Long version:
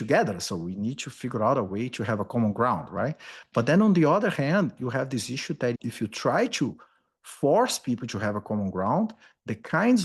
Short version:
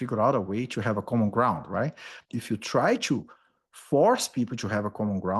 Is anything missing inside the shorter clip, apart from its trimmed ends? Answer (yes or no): yes